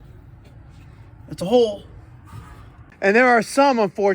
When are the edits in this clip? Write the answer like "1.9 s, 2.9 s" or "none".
2.8 s

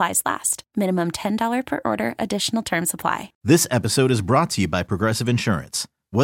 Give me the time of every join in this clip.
3.3 s

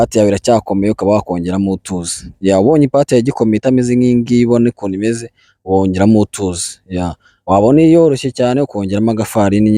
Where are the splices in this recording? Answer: none

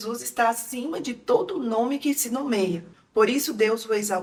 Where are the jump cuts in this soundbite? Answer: none

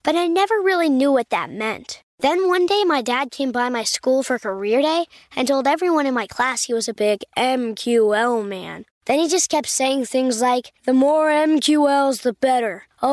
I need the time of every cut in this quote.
none

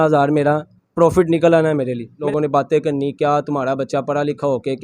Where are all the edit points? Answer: 2.1 s

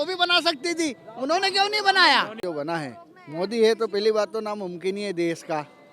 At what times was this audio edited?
2.3 s

